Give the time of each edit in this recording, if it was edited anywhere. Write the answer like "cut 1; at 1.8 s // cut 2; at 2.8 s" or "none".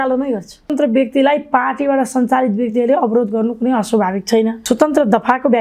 cut 1; at 0.7 s // cut 2; at 4.6 s